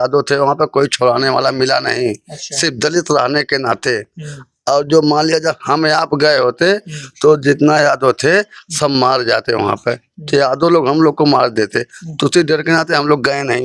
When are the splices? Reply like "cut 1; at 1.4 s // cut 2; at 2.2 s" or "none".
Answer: none

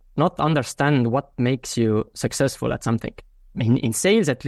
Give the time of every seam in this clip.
none

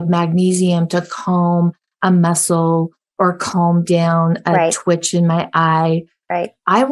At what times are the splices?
none

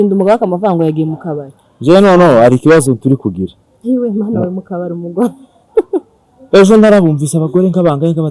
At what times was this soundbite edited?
none

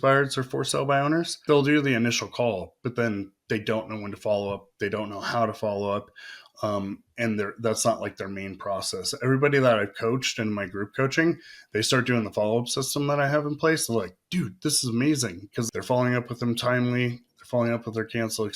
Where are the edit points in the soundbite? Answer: cut 1; at 1.4 s

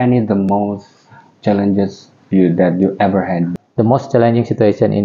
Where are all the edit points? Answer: cut 1; at 3.6 s

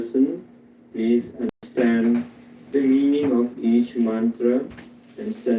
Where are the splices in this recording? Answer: cut 1; at 1.6 s

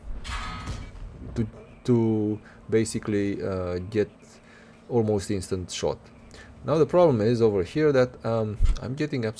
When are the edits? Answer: none

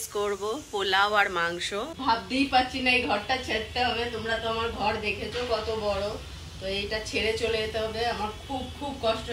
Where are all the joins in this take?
cut 1; at 1.9 s

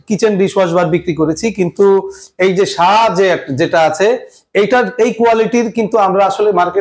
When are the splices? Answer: none

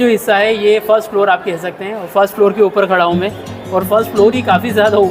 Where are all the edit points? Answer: none

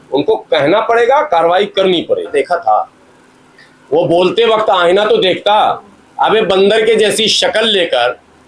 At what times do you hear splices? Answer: cut 1; at 2.3 s

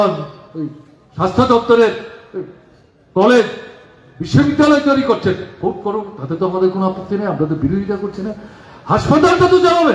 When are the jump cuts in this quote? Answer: none

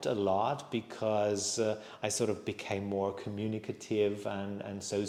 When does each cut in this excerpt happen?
none

